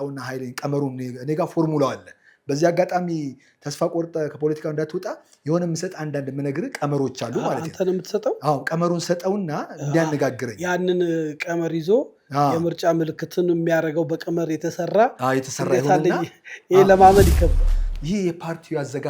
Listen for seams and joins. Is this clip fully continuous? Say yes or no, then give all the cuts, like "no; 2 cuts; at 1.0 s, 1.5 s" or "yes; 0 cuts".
no; 1 cut; at 17.6 s